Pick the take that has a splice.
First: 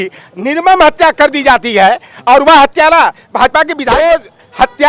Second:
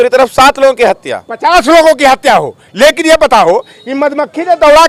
first; 1 cut; at 3.9 s

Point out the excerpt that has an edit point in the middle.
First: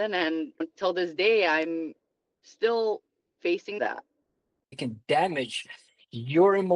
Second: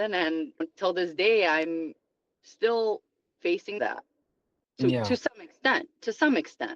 first; 1 cut; at 4.7 s

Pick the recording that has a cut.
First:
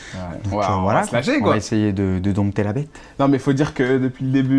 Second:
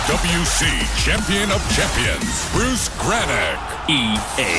first; 1 cut; at 2.2 s

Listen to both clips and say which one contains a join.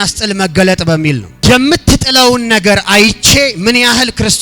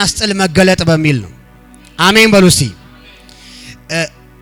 first; 1 cut; at 1.3 s

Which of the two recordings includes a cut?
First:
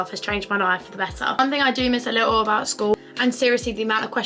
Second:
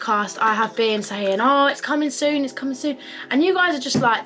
first; 2 cuts; at 1.3 s, 2.9 s

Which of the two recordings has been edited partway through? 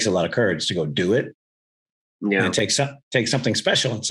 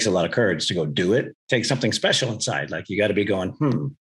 second; 1 cut; at 1.4 s

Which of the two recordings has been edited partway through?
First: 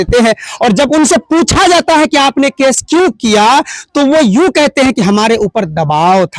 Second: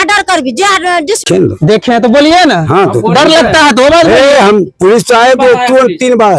second; 1 cut; at 1.2 s

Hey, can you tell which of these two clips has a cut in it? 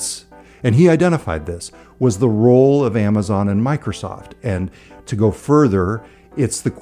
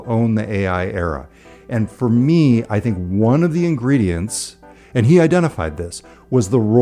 first; 1 cut; at 5.0 s

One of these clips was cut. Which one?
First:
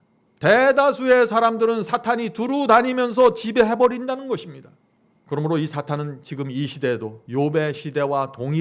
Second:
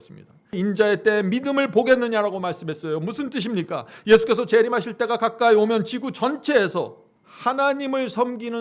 first; 1 cut; at 7.2 s

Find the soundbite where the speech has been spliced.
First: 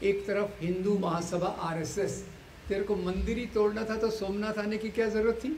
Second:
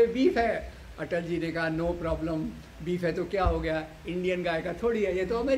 first; 1 cut; at 2.4 s

